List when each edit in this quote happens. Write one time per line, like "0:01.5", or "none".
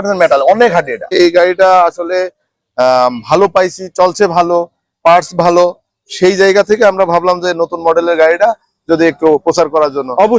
0:01.1